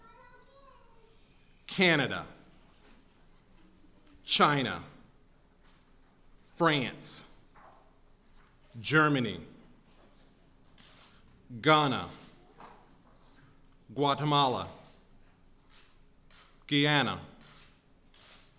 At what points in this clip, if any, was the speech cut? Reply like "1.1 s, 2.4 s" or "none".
4.6 s